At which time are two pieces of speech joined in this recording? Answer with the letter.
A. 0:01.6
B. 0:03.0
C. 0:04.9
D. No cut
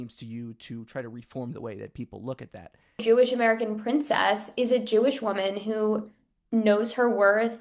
B